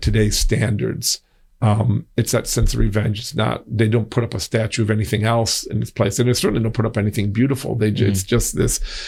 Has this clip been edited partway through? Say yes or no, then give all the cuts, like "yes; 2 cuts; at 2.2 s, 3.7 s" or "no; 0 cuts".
no; 0 cuts